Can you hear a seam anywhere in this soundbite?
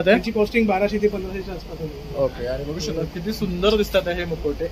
no; 0 cuts

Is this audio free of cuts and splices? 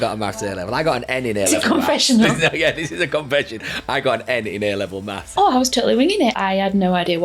no; 2 cuts; at 5.3 s, 6.4 s

